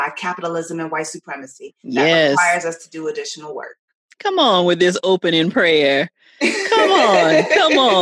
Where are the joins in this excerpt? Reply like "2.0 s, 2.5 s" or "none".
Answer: none